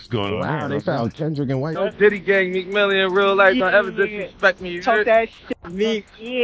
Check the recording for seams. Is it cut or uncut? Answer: cut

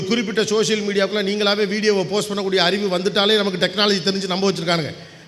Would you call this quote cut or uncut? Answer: uncut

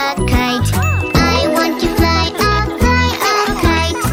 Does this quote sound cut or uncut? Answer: uncut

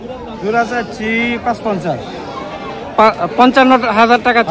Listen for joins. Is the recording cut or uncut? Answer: uncut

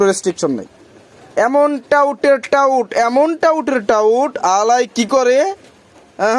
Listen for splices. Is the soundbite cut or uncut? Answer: uncut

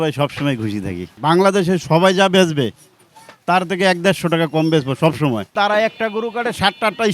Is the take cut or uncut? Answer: cut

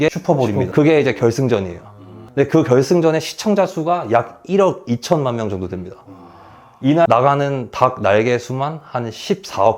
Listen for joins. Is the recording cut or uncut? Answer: uncut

